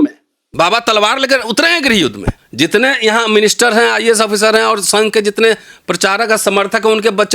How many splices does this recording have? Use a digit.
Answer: 1